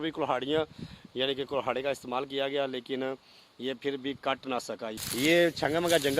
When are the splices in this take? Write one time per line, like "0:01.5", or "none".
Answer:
0:05.1